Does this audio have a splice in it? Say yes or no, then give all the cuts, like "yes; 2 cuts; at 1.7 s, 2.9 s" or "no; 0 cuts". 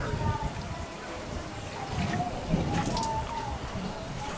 no; 0 cuts